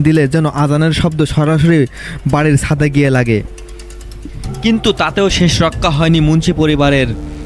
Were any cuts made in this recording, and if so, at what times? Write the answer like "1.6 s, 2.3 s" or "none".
none